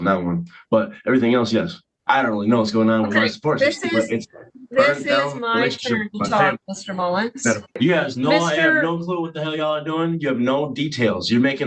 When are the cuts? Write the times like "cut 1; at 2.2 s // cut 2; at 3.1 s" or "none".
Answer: cut 1; at 1.8 s // cut 2; at 7.8 s